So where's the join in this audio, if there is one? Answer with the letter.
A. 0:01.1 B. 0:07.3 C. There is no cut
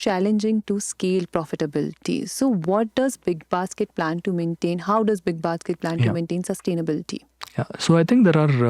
C